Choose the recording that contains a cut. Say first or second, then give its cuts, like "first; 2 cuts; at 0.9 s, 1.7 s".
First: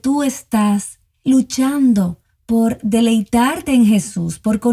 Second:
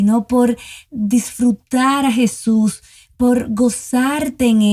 first; 1 cut; at 1.2 s